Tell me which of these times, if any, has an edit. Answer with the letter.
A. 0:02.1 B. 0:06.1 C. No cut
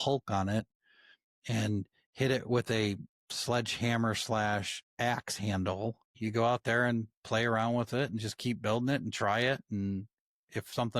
B